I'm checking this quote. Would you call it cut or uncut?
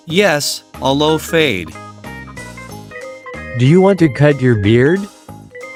uncut